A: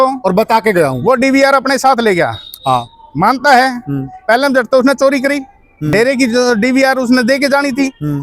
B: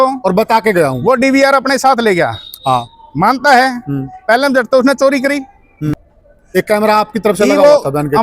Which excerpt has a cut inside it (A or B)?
B